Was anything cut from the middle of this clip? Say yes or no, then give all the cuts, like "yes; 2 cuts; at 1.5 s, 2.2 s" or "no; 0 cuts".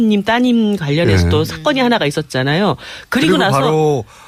no; 0 cuts